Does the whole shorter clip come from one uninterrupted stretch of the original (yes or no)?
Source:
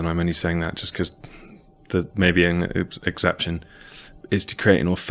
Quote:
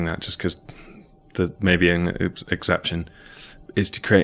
yes